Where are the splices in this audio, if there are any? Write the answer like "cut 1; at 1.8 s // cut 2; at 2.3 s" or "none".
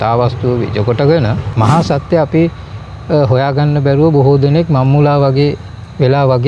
cut 1; at 1.4 s